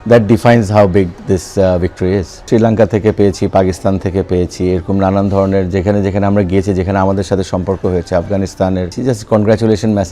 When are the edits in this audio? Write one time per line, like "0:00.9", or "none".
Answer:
0:02.4
0:08.9